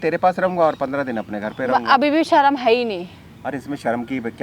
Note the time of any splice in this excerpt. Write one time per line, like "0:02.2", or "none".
none